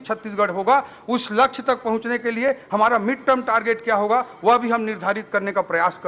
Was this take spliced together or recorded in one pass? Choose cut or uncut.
uncut